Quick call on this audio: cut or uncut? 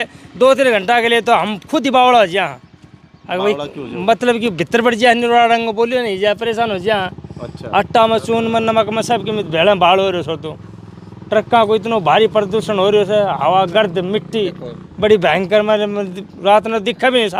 uncut